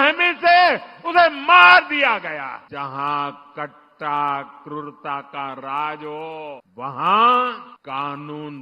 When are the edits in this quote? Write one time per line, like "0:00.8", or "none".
0:02.6
0:06.7
0:07.7